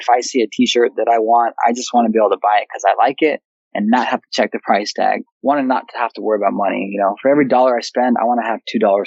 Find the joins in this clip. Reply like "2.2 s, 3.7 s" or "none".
5.3 s